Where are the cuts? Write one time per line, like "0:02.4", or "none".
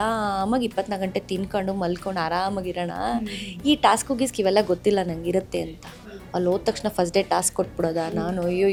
none